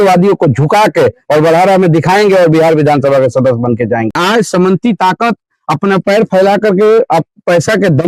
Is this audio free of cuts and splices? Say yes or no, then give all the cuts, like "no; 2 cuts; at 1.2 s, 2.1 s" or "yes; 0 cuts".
no; 1 cut; at 4.1 s